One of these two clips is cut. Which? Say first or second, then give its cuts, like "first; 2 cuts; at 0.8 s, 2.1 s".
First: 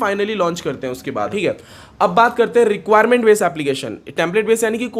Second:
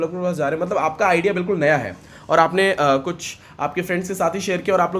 first; 1 cut; at 1.3 s